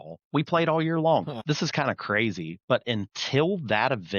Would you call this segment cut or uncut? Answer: cut